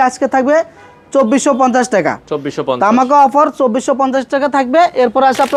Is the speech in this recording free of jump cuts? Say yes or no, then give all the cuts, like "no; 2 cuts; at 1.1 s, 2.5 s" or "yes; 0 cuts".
yes; 0 cuts